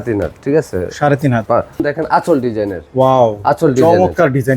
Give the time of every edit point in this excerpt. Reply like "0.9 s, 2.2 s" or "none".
1.8 s